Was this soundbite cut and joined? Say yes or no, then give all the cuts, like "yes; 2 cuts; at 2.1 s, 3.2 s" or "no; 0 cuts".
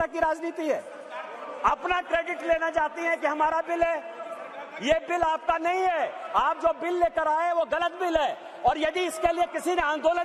no; 0 cuts